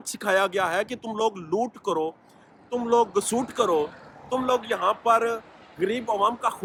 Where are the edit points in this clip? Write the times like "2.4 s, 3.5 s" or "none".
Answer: none